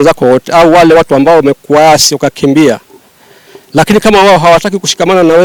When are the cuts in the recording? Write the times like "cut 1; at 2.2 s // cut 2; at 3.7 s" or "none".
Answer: none